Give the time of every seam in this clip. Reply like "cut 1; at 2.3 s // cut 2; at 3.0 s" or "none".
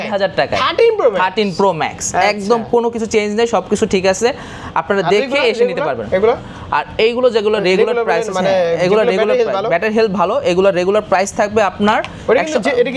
none